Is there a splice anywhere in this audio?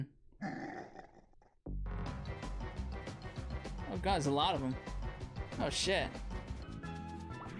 yes; 1 cut; at 6.6 s

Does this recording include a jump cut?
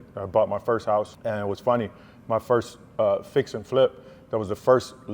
yes; 1 cut; at 1.1 s

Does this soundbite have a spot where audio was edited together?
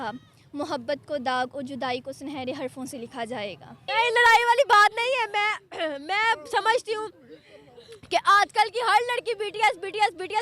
yes; 1 cut; at 3.8 s

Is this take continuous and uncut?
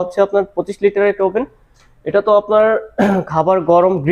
yes; 0 cuts

